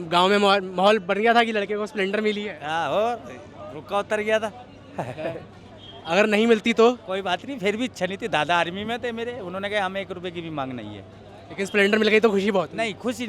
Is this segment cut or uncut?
uncut